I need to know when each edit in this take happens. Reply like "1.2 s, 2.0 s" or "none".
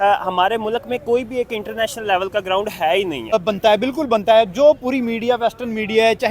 3.3 s